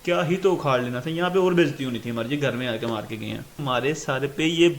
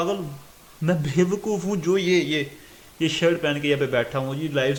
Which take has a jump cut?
first; 1 cut; at 3.6 s

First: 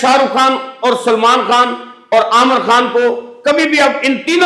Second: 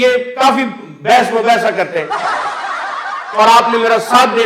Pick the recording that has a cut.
second; 2 cuts; at 2.1 s, 3.3 s

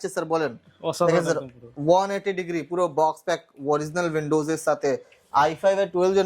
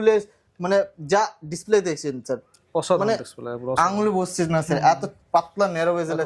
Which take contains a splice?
first; 1 cut; at 5.1 s

